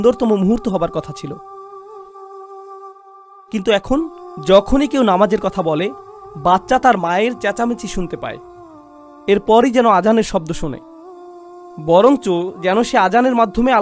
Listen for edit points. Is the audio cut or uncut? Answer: uncut